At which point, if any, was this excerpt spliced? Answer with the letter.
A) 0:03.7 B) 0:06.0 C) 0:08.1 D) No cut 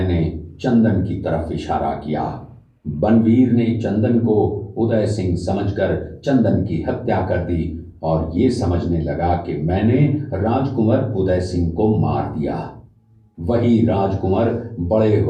D